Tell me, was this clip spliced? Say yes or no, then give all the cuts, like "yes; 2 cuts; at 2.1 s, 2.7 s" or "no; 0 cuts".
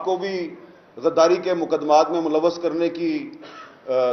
no; 0 cuts